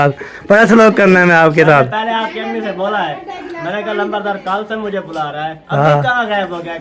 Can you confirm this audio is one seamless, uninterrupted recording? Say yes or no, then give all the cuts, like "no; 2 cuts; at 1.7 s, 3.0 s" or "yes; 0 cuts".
yes; 0 cuts